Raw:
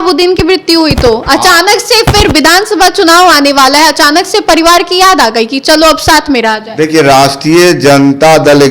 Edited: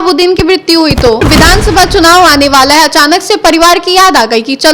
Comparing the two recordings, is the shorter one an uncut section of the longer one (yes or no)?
no